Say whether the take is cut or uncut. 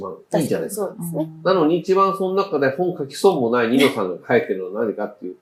uncut